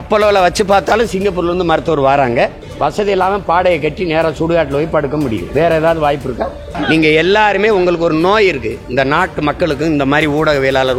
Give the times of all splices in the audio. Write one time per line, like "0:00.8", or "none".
0:02.6
0:06.8